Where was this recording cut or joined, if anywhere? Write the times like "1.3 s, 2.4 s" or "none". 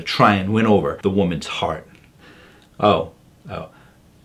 1.0 s, 1.9 s